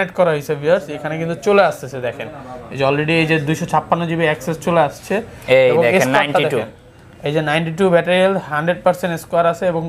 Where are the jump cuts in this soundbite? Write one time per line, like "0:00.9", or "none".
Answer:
none

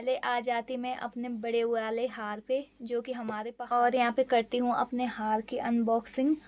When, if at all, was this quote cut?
0:03.7

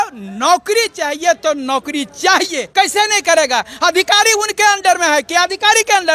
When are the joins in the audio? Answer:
0:02.6

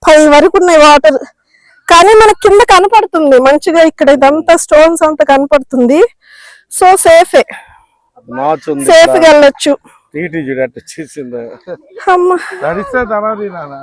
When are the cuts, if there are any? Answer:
none

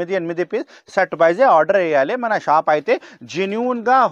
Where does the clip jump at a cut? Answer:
none

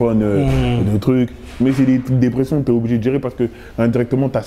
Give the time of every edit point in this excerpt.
none

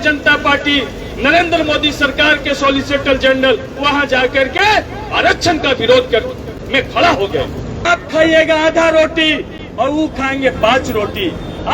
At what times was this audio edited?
0:07.8

